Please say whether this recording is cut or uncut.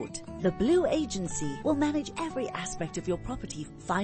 uncut